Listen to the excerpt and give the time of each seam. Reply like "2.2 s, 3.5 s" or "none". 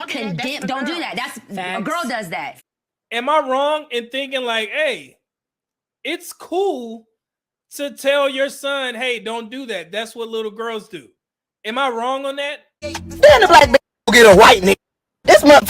2.5 s, 12.7 s